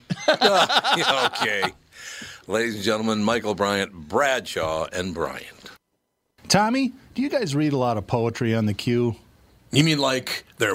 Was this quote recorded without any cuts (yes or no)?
no